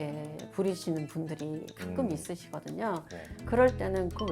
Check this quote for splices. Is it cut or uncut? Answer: cut